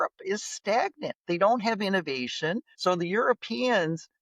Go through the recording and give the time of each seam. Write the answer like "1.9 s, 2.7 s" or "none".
2.7 s

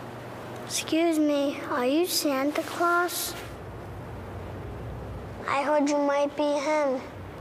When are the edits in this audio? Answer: none

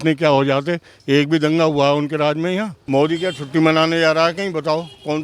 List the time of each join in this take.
2.8 s

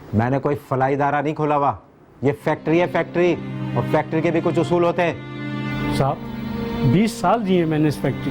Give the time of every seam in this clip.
none

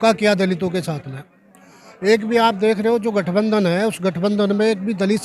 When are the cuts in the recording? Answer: none

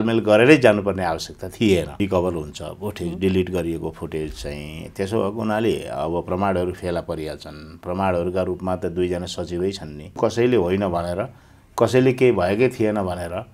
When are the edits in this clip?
2.0 s, 10.2 s

